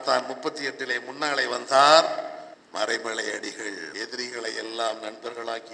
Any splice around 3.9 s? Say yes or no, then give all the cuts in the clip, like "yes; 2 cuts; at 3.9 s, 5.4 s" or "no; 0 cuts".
yes; 1 cut; at 3.9 s